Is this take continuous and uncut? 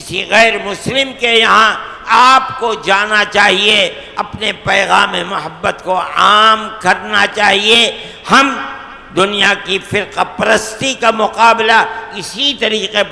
yes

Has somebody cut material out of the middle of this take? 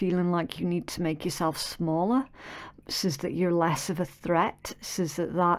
no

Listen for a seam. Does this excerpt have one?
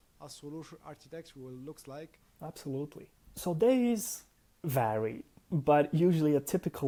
no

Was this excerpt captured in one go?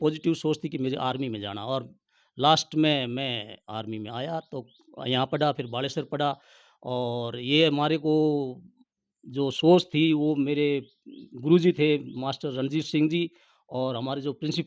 yes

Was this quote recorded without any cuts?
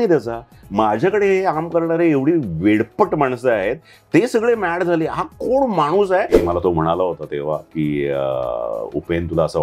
no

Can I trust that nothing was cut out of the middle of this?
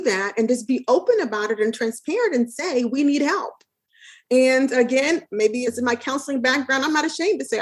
no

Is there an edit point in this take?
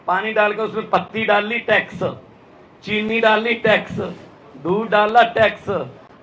no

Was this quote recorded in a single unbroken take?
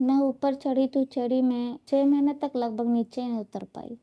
no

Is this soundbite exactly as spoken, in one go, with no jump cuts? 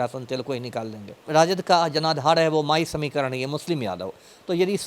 no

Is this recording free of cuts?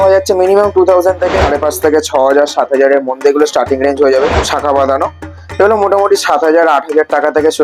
no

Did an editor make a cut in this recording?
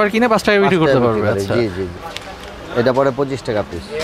yes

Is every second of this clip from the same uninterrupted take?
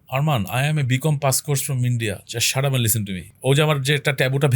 no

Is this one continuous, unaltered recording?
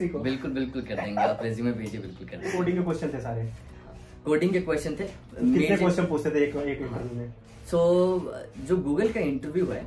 no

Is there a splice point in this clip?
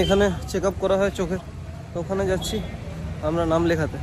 no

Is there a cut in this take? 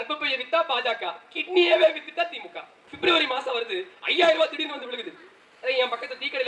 yes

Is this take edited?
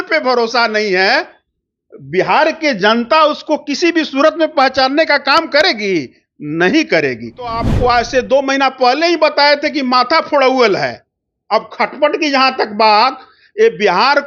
yes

